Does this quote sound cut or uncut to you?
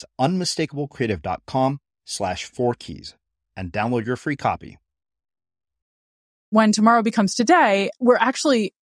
cut